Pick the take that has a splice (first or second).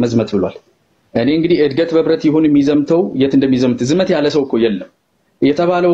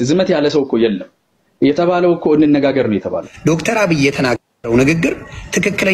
second